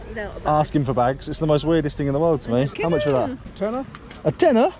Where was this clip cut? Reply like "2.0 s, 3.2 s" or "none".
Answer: 2.7 s, 3.4 s